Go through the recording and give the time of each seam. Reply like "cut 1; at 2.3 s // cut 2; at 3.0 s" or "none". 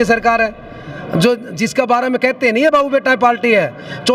none